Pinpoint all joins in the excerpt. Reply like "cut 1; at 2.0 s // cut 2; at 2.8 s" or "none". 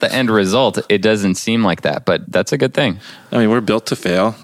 cut 1; at 2.2 s